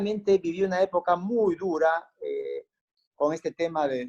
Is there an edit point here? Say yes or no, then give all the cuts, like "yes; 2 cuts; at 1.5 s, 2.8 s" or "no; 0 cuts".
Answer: no; 0 cuts